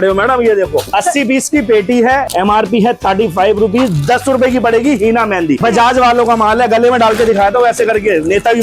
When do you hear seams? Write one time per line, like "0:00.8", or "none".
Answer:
0:02.3
0:05.6